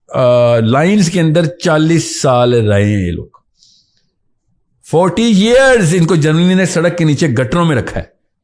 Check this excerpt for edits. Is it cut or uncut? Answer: uncut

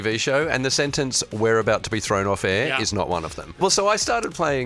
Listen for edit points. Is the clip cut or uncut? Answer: cut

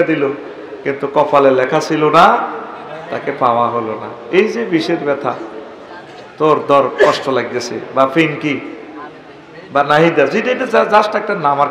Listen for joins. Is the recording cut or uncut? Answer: uncut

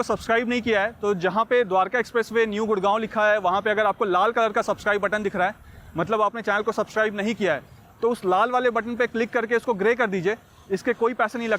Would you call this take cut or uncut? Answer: uncut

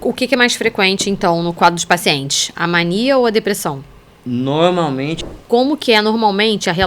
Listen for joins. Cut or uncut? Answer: cut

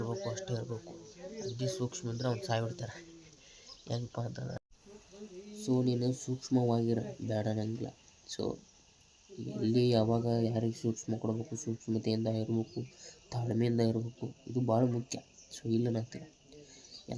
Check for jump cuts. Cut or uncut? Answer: cut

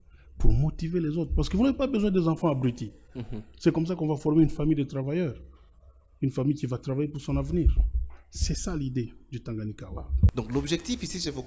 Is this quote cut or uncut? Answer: cut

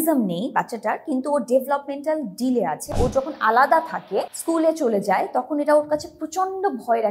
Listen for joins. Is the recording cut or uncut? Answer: cut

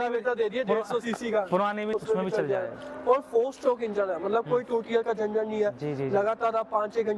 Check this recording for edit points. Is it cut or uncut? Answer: cut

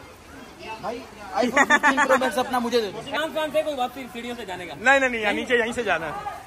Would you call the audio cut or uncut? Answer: cut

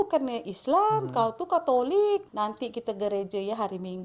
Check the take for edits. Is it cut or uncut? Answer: cut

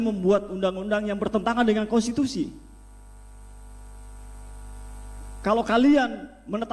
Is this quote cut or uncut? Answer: uncut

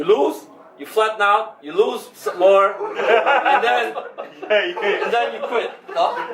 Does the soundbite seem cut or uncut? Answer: uncut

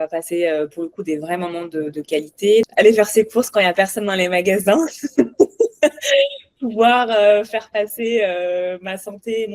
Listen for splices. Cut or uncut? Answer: cut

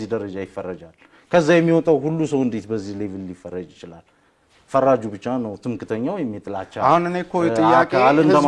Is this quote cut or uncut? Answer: uncut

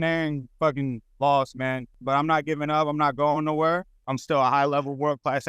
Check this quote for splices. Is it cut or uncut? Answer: cut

